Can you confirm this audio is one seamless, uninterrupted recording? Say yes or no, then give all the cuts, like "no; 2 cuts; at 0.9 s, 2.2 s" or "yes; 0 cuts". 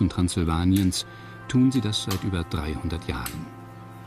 yes; 0 cuts